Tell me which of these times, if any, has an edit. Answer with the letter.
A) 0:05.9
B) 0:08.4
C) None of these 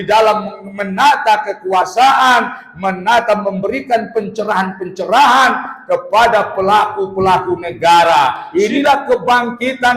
B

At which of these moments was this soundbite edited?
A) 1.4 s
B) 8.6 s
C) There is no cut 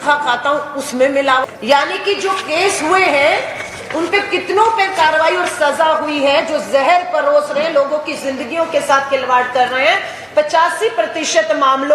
A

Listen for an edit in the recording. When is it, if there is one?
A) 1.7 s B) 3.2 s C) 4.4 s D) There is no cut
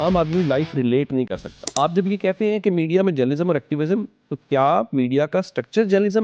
A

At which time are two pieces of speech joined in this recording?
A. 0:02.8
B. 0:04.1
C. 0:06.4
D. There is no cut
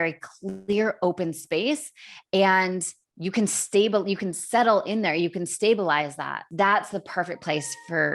C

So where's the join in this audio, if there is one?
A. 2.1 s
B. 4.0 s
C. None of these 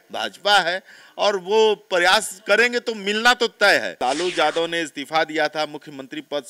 B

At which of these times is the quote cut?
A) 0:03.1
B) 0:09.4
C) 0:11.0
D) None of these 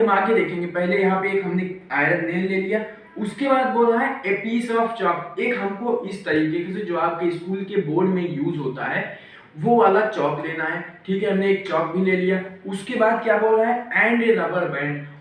D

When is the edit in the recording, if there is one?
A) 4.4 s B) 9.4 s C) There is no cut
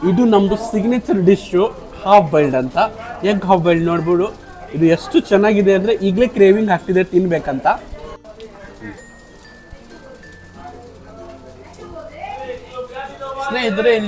C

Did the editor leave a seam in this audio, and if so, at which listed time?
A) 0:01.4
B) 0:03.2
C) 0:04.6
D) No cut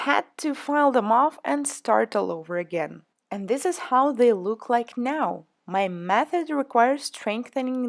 A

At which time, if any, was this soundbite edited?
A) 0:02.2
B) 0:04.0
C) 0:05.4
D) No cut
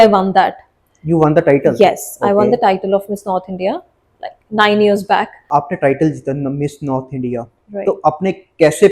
C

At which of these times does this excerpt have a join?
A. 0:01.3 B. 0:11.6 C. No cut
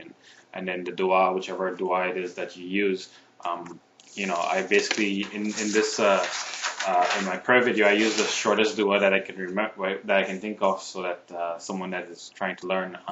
A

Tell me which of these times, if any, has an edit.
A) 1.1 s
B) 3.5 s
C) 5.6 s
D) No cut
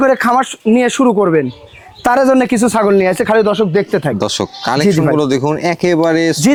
D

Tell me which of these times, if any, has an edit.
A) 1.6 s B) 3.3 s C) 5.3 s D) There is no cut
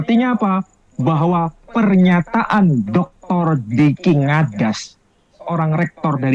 D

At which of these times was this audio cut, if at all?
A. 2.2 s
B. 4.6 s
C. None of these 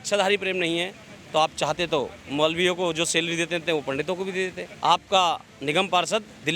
B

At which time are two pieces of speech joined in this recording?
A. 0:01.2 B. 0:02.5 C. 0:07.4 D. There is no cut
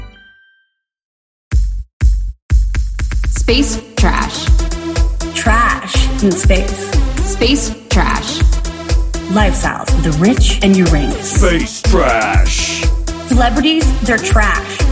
A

